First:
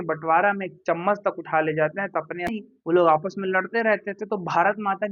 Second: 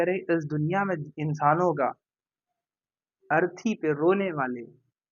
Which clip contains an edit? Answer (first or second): first